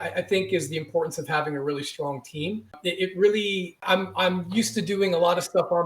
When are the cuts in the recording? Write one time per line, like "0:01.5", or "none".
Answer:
0:02.8
0:03.7

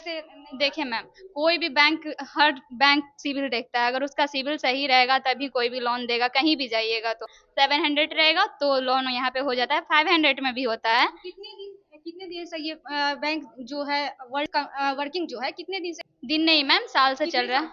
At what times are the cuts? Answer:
0:07.4
0:14.5
0:16.1

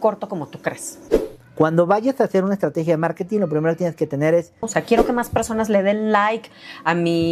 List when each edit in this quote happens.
0:01.0
0:04.7

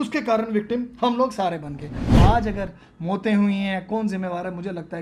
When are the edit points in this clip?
0:02.2

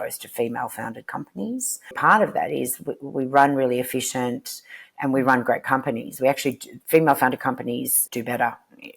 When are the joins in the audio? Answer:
0:01.9
0:08.0

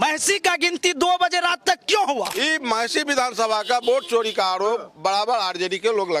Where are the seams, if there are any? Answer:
0:02.3

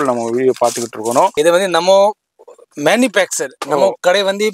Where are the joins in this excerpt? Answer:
0:01.3

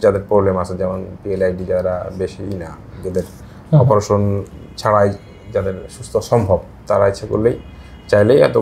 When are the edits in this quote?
none

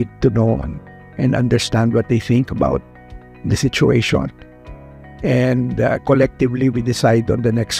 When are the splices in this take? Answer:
none

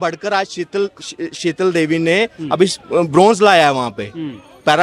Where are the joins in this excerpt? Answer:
none

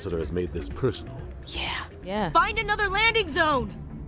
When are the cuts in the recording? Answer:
0:02.1

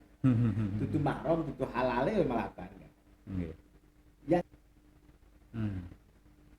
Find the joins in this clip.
0:04.4

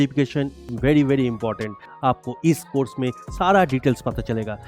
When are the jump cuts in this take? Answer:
0:01.8

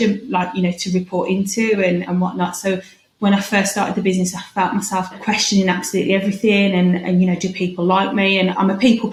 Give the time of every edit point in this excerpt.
none

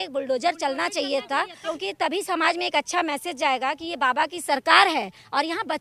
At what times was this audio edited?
none

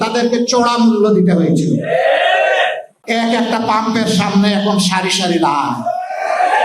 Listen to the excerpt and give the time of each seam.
0:02.9

